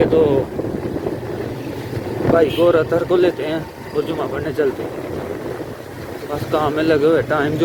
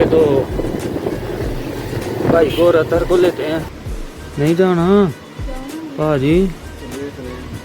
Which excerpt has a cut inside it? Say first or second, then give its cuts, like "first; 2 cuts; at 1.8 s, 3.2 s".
second; 1 cut; at 3.8 s